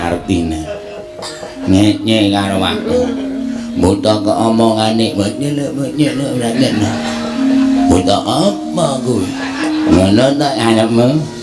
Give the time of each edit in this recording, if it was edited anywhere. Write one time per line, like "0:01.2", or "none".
0:09.9